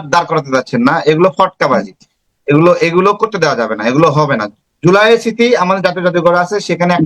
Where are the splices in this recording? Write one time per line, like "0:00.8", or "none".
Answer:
none